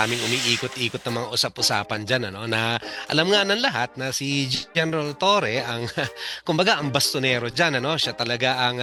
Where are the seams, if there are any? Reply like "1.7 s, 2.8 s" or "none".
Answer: none